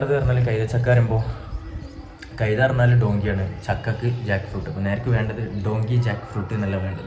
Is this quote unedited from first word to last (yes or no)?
yes